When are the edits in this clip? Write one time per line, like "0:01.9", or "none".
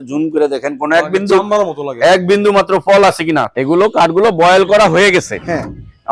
0:03.5